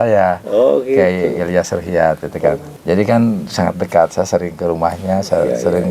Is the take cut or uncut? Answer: cut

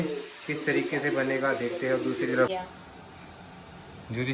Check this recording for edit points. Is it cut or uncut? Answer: cut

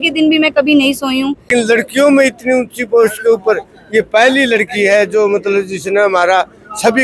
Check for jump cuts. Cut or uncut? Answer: cut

